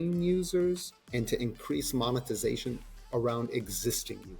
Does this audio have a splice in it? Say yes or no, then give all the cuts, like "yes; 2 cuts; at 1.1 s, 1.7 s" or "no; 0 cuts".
yes; 2 cuts; at 0.9 s, 2.9 s